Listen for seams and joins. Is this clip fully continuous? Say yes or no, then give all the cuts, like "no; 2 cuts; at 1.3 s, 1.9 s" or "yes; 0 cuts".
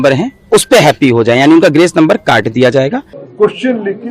no; 1 cut; at 3.2 s